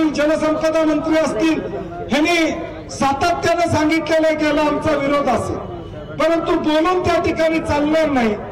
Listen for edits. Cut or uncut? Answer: uncut